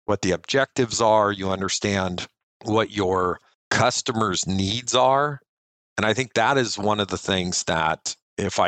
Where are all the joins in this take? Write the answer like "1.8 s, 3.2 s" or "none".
none

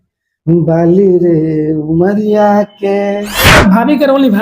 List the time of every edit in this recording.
3.5 s

